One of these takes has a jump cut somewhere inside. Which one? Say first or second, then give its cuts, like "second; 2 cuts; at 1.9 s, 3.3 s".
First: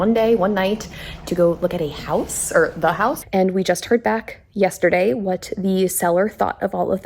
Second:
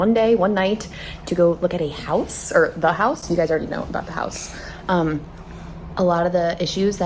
first; 1 cut; at 3.2 s